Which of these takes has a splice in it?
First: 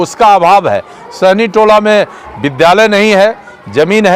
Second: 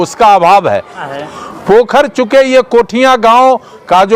second; 1 cut; at 1.0 s

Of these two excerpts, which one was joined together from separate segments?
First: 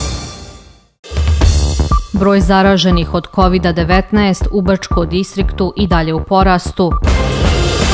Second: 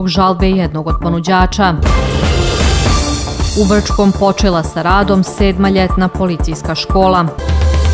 first; 1 cut; at 1.0 s

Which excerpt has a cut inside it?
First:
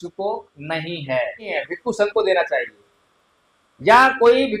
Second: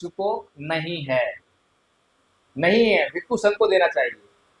first; 1 cut; at 1.6 s

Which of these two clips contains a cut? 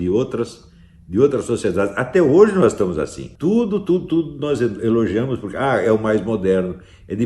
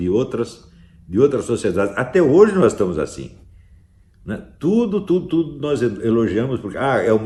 first; 1 cut; at 3.2 s

